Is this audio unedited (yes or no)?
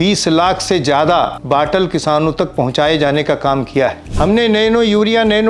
no